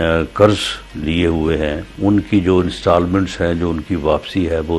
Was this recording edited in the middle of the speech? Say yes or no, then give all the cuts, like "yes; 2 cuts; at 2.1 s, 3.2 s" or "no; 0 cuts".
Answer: yes; 1 cut; at 1.9 s